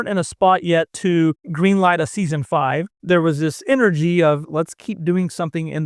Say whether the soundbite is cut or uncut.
cut